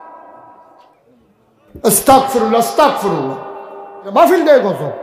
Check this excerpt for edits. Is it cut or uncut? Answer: cut